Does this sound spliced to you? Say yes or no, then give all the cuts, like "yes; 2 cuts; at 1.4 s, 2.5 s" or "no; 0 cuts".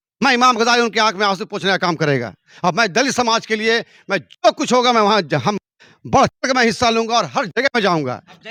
no; 0 cuts